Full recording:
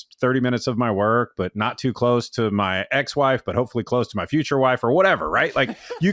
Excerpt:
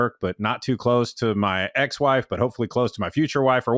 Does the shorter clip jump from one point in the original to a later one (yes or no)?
no